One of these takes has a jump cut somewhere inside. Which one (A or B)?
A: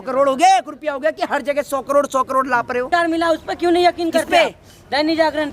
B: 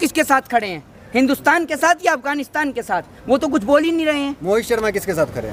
A